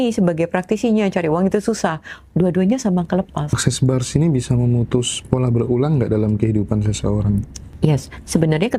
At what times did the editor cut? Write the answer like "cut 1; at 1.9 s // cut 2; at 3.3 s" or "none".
cut 1; at 3.6 s // cut 2; at 7.7 s